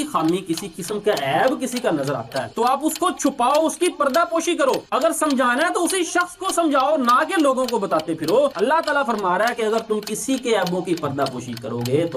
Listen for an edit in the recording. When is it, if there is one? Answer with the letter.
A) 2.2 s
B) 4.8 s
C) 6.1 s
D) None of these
D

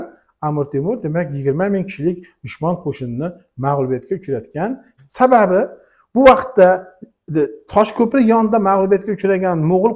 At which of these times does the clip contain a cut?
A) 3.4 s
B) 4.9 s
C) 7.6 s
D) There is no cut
B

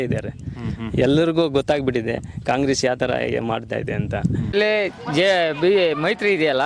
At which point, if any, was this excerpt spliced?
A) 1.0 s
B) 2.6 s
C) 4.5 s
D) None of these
C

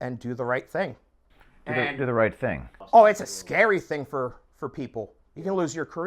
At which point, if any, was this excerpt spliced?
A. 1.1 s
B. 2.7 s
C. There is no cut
A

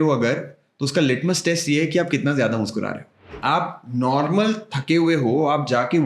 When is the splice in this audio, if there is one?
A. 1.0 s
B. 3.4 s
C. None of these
B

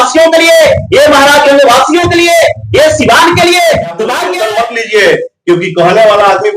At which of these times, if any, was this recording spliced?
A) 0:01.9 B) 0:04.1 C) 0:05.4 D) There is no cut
B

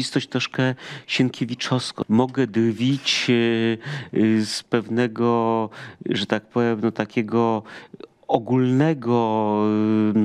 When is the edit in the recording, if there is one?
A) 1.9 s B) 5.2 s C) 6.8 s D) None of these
A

